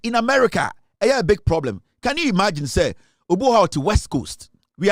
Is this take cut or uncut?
uncut